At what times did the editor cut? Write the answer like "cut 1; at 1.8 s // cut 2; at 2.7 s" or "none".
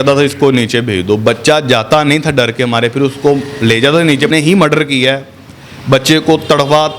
cut 1; at 4.3 s